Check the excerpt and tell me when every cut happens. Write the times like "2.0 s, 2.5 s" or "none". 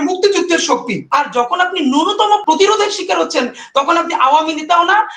1.0 s, 2.4 s